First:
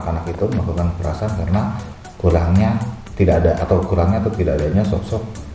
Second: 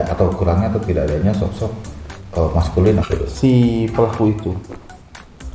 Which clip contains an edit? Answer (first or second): second